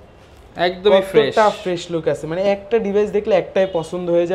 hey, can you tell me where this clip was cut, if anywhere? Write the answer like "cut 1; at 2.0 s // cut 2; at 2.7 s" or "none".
none